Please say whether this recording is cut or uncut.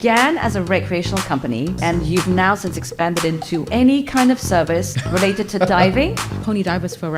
cut